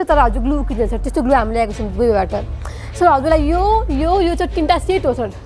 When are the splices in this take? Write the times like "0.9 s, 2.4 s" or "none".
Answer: none